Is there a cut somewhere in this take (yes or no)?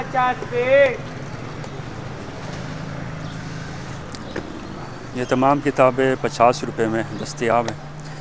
no